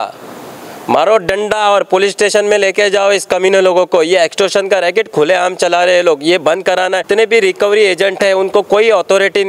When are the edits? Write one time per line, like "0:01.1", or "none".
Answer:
0:07.1